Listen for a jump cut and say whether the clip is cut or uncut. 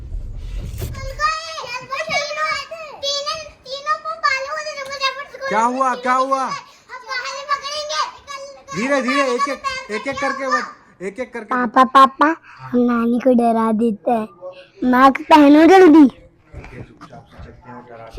cut